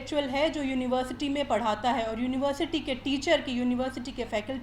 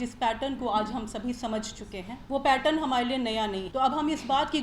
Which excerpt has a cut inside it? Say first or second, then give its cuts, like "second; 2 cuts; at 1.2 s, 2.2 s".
second; 2 cuts; at 2.1 s, 3.6 s